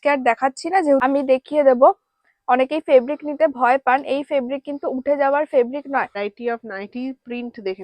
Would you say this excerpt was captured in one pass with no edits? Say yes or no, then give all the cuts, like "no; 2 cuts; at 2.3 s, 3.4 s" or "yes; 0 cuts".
no; 2 cuts; at 1.0 s, 6.3 s